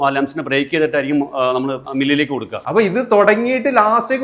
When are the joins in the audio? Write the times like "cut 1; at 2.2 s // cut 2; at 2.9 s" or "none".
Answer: cut 1; at 2.6 s